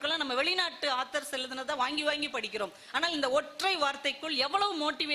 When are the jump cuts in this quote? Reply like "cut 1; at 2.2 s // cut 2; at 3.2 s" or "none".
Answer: none